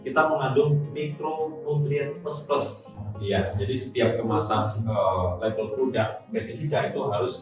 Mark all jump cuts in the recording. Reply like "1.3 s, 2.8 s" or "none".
2.9 s